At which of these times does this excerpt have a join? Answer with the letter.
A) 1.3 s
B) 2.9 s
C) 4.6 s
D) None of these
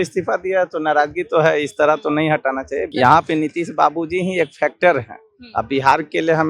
B